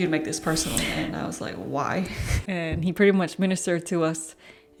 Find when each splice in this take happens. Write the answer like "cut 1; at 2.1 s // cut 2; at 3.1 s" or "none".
none

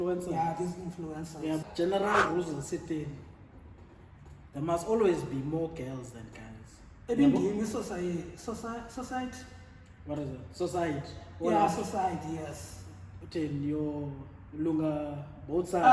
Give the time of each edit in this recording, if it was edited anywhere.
cut 1; at 1.7 s

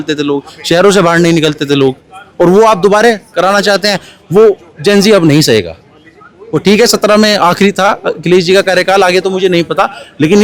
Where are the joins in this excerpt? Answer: none

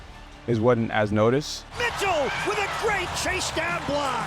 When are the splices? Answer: cut 1; at 1.7 s

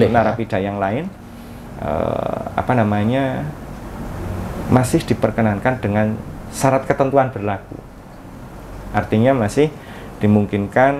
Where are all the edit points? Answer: none

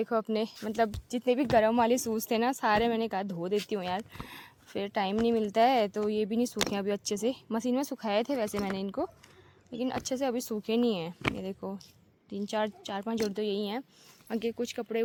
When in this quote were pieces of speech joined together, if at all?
none

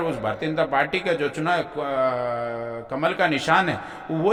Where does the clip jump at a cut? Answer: none

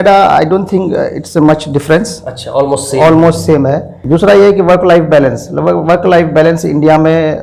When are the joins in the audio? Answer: cut 1; at 4.0 s

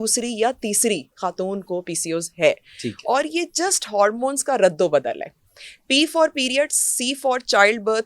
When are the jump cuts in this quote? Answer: none

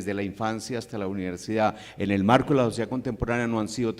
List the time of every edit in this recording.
none

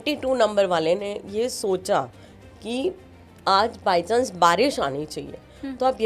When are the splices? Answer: none

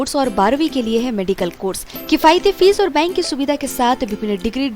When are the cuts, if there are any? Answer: none

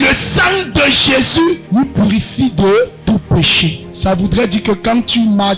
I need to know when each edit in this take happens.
cut 1; at 1.6 s // cut 2; at 3.0 s // cut 3; at 3.9 s

